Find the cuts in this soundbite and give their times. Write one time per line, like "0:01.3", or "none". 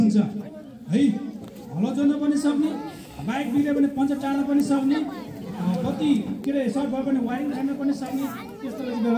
none